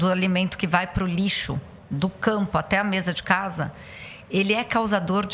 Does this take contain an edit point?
no; 0 cuts

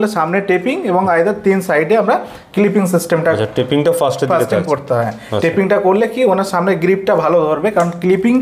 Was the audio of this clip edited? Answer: no; 0 cuts

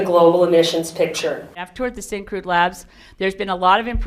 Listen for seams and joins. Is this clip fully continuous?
no; 1 cut; at 1.5 s

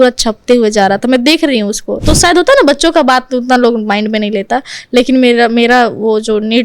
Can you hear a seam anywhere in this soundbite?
yes; 1 cut; at 2.0 s

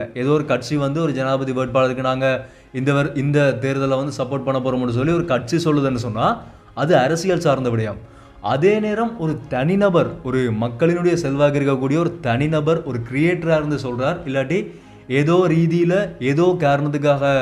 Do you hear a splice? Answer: no; 0 cuts

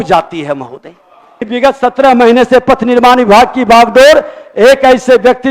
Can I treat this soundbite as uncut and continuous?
no; 1 cut; at 1.5 s

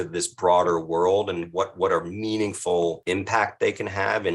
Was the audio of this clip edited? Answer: yes; 1 cut; at 3.0 s

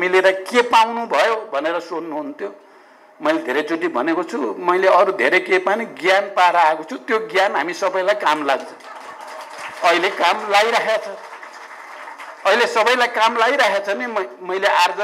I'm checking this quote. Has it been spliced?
no; 0 cuts

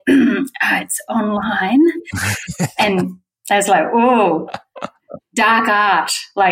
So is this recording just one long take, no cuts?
yes; 0 cuts

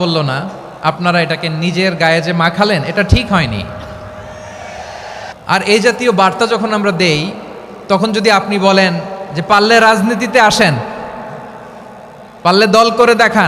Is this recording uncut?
no; 1 cut; at 5.3 s

